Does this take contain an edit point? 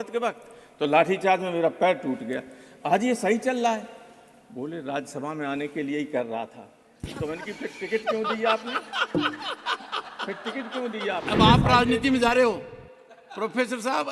yes; 1 cut; at 11.2 s

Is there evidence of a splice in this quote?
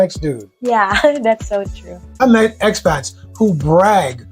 yes; 1 cut; at 2.2 s

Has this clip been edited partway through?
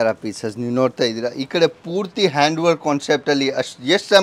no; 0 cuts

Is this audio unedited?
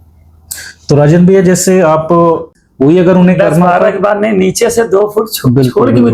no; 1 cut; at 2.5 s

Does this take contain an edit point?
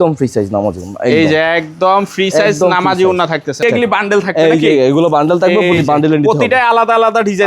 yes; 1 cut; at 3.6 s

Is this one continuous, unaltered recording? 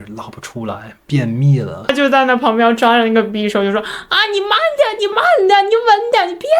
no; 1 cut; at 1.9 s

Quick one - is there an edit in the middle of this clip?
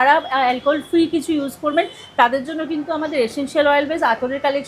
no; 0 cuts

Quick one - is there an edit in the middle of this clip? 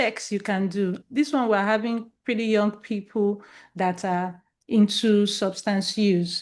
yes; 1 cut; at 1.0 s

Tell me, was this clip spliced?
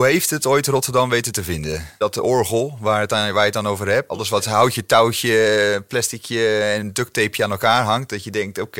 yes; 2 cuts; at 2.0 s, 4.2 s

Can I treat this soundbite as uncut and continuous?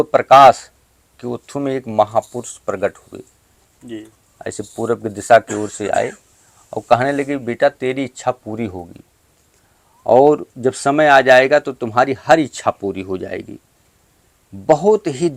yes; 0 cuts

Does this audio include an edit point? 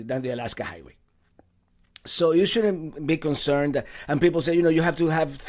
no; 0 cuts

